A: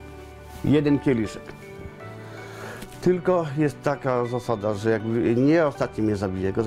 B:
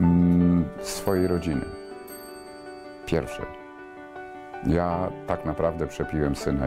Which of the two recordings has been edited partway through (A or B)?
B